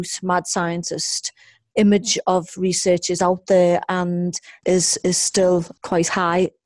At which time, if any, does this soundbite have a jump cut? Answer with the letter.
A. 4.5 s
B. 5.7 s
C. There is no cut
A